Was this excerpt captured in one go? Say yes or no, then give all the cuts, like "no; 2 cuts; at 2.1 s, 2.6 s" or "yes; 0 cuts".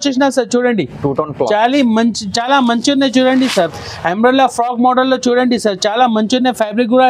yes; 0 cuts